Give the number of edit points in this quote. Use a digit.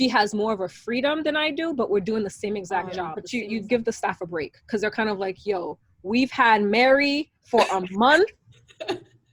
1